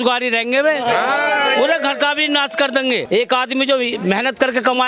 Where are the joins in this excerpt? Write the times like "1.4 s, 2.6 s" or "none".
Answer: 3.0 s